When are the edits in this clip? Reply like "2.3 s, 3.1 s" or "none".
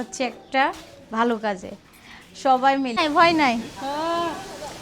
3.0 s